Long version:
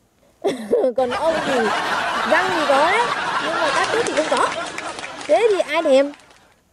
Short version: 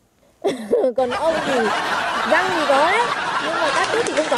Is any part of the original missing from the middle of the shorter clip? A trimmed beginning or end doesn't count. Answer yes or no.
no